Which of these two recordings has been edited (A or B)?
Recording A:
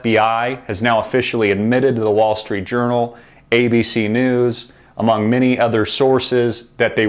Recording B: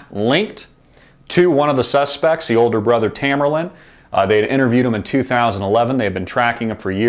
A